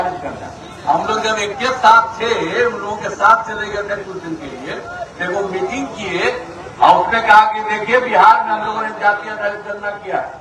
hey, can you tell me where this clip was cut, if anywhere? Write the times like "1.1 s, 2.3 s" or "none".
none